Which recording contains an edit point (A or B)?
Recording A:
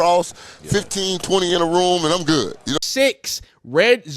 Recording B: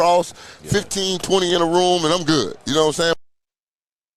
A